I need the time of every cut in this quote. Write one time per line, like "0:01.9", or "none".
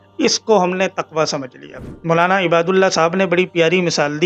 none